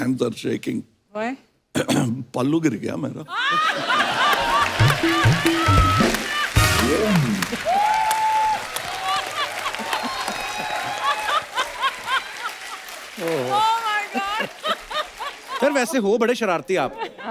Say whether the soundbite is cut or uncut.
cut